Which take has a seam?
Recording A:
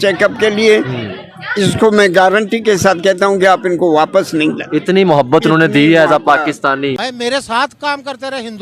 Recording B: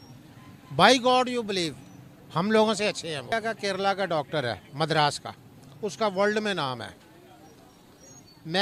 A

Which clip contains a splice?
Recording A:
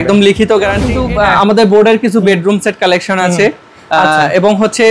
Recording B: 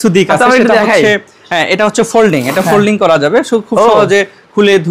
A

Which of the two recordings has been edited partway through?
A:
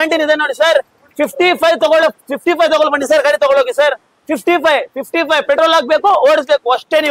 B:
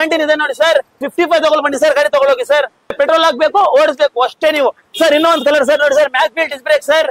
B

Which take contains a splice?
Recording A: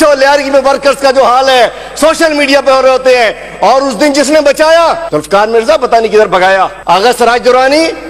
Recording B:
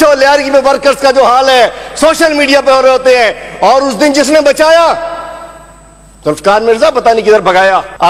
A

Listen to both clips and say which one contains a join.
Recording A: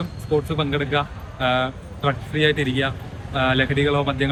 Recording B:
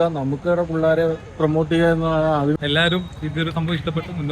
B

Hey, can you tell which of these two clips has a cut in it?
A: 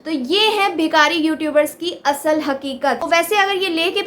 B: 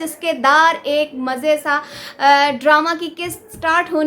A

